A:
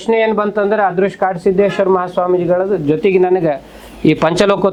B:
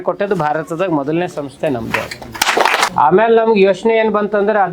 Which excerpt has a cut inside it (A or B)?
B